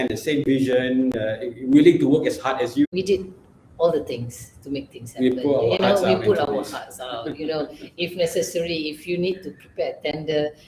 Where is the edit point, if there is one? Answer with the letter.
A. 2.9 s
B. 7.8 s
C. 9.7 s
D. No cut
A